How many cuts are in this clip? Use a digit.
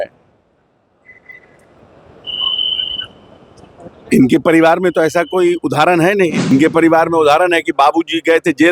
1